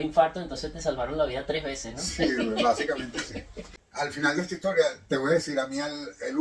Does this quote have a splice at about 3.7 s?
yes; 1 cut; at 3.7 s

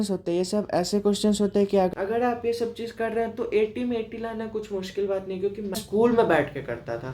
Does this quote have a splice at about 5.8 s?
yes; 2 cuts; at 1.9 s, 5.8 s

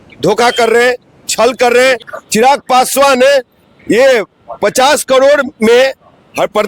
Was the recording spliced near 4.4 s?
no; 1 cut; at 2.0 s

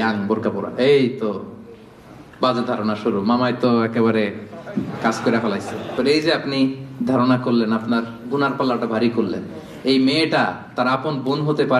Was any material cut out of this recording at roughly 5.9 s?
yes; 1 cut; at 5.9 s

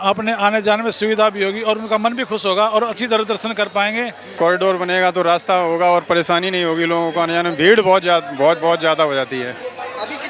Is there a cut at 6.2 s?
no; 1 cut; at 4.2 s

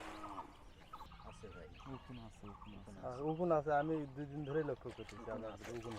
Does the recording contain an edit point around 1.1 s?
yes; 1 cut; at 1.1 s

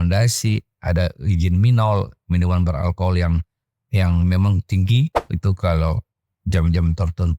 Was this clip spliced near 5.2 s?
yes; 1 cut; at 5.2 s

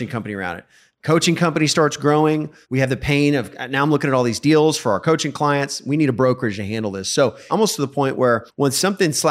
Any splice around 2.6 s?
yes; 3 cuts; at 2.6 s, 7.4 s, 8.5 s

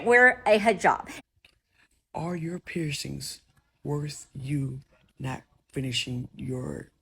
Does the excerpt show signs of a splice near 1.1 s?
yes; 1 cut; at 1.1 s

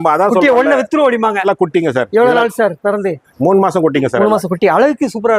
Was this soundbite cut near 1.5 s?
yes; 1 cut; at 1.5 s

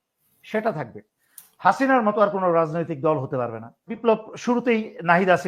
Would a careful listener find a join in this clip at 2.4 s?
no; 1 cut; at 3.9 s

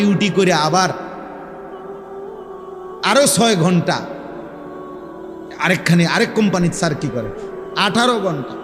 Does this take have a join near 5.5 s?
no; 2 cuts; at 1.6 s, 3.0 s

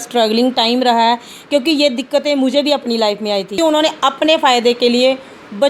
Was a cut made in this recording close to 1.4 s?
no; 1 cut; at 3.5 s

